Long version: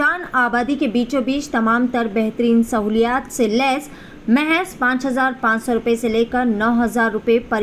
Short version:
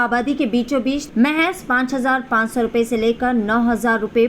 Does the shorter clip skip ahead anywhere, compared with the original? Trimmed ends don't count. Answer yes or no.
yes